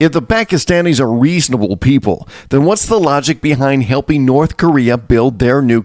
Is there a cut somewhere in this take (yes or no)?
no